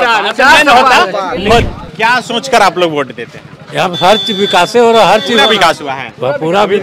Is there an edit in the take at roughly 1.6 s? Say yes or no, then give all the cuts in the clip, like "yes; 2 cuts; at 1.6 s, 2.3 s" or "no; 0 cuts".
yes; 1 cut; at 1.6 s